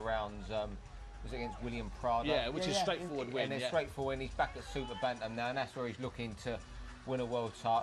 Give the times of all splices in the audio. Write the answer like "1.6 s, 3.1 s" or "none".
6.3 s